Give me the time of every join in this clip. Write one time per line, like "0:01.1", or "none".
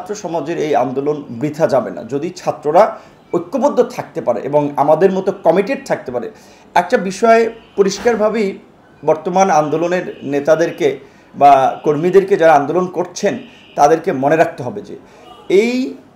none